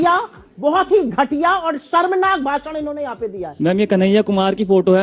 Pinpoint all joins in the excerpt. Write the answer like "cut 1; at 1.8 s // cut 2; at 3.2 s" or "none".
cut 1; at 3.4 s